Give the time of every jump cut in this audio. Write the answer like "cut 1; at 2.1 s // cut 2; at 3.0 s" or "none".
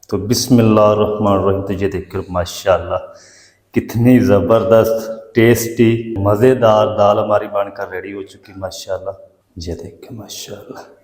cut 1; at 6.2 s // cut 2; at 9.4 s